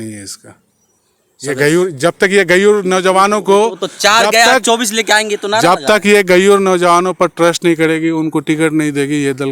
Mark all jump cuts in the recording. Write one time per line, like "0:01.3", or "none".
none